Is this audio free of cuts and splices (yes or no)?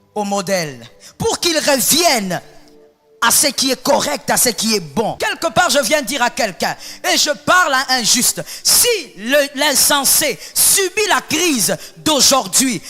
no